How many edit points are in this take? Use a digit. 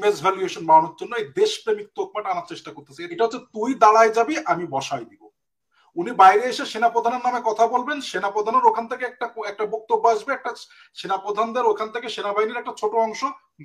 1